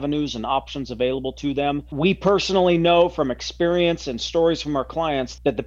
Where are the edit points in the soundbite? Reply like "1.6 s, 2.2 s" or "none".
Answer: 1.9 s